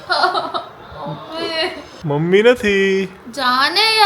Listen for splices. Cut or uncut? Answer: cut